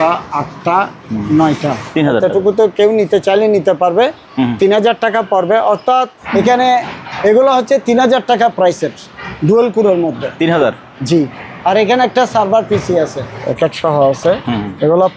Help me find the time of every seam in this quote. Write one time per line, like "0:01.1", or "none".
0:01.8
0:06.2
0:13.3

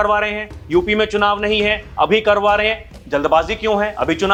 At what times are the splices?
none

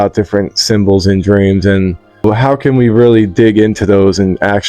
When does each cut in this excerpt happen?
none

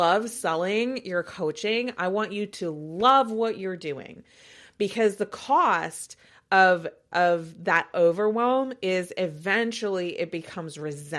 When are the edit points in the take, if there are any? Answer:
none

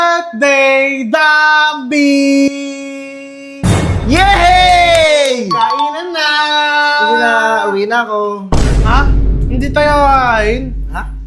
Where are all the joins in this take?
none

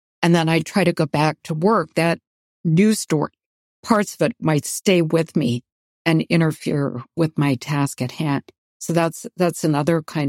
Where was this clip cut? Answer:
none

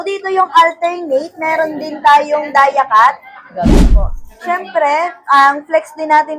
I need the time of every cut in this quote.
0:03.8

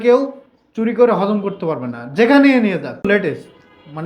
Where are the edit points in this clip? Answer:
0:03.0

